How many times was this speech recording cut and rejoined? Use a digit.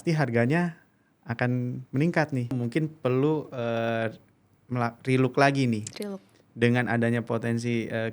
1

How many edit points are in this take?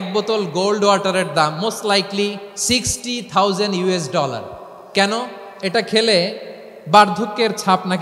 2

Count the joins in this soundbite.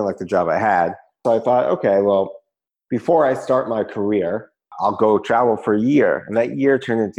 2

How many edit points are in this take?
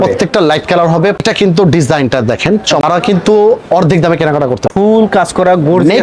3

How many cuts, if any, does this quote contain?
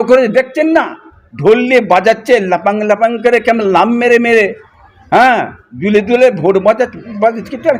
0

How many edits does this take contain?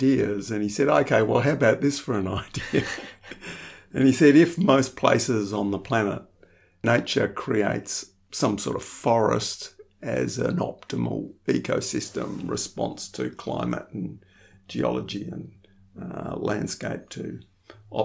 1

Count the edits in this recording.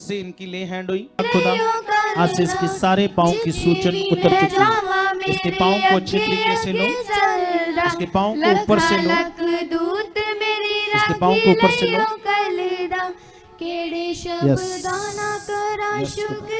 1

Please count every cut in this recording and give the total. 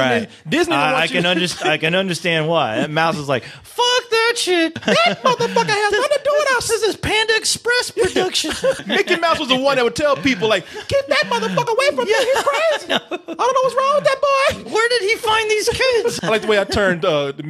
3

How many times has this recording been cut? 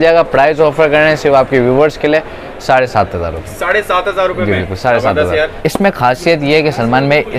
1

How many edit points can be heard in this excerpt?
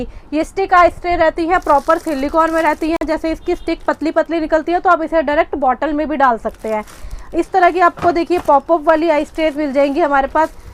0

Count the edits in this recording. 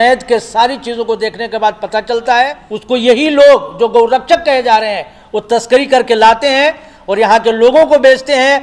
1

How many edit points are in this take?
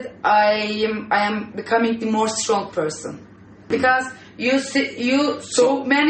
1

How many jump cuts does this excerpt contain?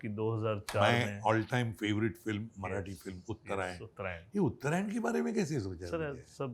0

